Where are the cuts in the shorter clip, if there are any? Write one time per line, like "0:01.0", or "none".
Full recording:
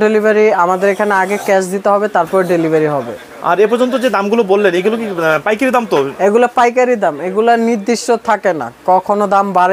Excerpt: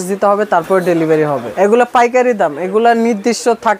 0:01.5